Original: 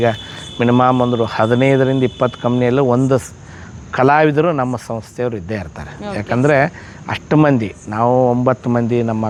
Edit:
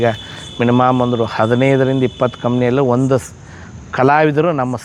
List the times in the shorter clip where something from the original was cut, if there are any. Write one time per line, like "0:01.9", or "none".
none

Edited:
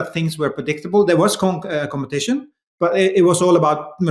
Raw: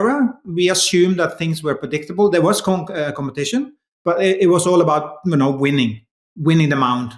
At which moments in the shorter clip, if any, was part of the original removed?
none

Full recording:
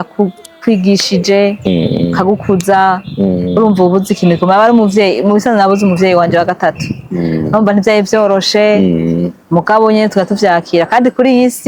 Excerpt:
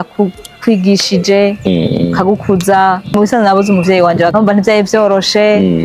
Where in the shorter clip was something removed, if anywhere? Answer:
0:03.1
0:04.3

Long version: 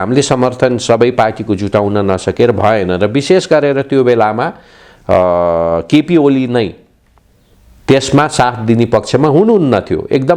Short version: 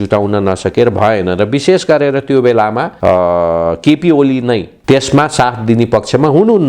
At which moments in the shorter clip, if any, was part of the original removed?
0:02.9
0:04.7

